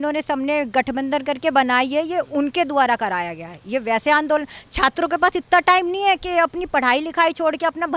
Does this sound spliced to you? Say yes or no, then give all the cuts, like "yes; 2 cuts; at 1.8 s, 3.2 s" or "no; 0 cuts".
no; 0 cuts